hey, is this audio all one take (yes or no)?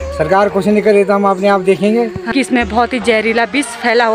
no